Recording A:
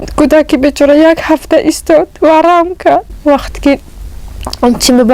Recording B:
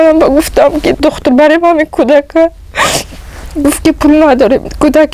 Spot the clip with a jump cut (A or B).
A